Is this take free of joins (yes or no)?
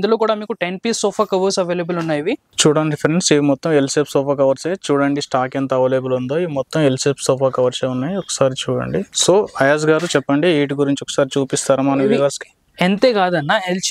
no